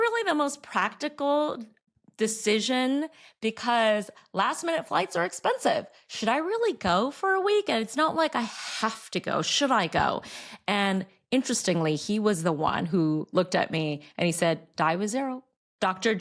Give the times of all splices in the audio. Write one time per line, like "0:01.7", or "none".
none

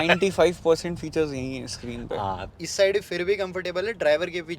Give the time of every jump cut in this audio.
0:02.6

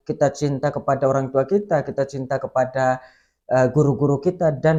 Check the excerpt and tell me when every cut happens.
none

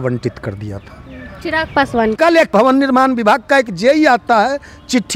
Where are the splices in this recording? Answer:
0:02.5

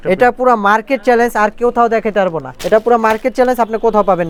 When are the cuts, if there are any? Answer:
none

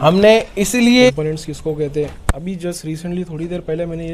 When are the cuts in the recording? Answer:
0:01.2

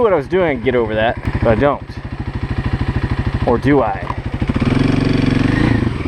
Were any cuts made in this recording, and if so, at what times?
0:01.3

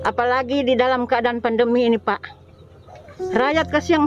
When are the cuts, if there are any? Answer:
none

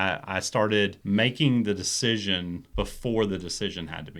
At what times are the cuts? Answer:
0:01.0
0:02.6

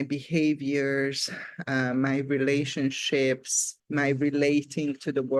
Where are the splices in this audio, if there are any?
none

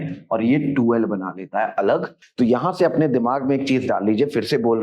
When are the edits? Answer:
0:02.2

